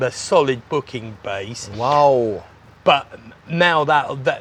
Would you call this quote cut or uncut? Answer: uncut